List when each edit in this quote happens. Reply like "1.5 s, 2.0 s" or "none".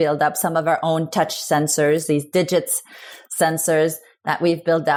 none